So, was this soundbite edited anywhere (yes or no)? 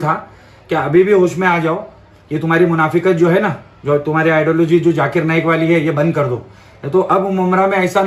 no